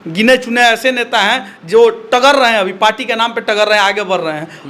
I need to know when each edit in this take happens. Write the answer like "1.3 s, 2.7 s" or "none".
none